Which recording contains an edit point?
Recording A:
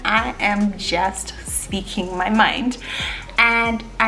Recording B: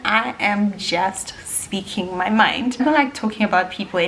B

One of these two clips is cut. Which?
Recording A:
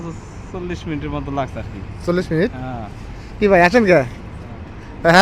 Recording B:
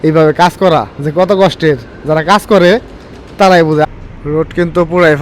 B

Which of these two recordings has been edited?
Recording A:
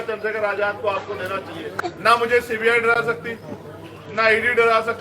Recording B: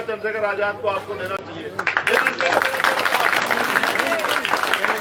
A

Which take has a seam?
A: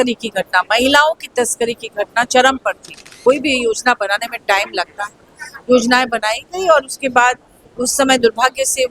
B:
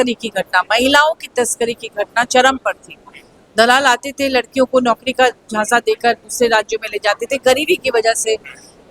A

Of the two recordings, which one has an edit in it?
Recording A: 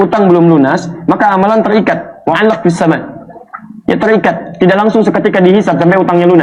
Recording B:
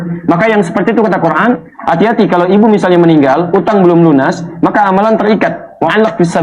B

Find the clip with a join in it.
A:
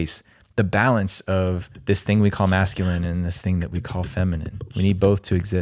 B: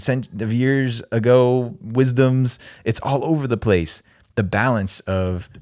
A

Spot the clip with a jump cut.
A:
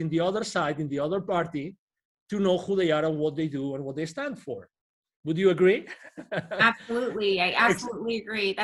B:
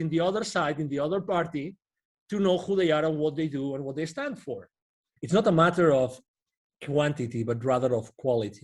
B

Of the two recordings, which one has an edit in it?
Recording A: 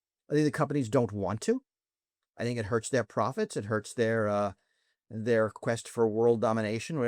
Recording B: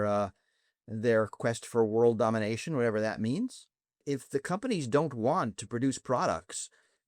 B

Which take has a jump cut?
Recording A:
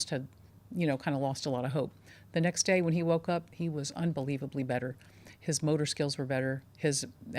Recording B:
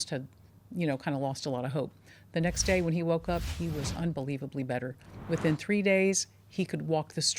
B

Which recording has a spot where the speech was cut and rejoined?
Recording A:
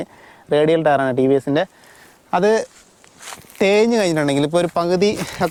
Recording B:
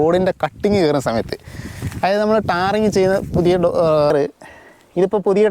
B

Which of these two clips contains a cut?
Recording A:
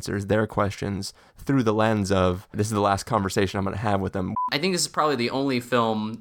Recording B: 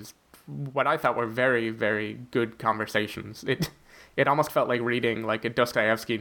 A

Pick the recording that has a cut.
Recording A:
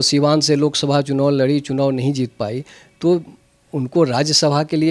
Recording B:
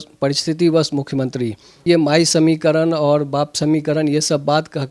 B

